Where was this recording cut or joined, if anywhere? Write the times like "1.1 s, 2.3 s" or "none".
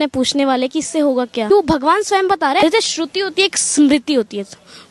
1.5 s, 2.6 s